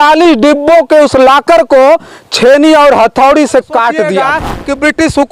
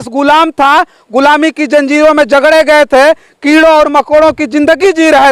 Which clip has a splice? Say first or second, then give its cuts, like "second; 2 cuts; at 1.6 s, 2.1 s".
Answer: first; 1 cut; at 4.2 s